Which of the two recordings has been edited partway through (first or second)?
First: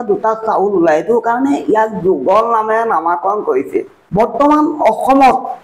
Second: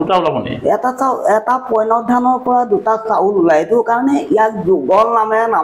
first